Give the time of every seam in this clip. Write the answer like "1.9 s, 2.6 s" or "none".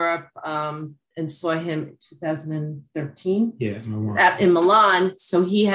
none